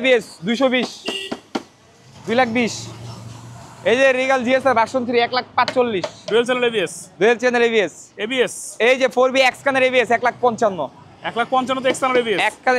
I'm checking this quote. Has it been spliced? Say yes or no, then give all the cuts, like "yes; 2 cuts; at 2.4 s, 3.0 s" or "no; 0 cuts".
no; 0 cuts